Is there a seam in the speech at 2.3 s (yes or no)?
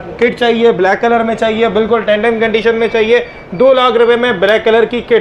no